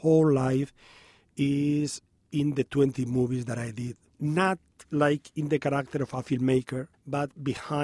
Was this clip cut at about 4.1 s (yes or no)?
yes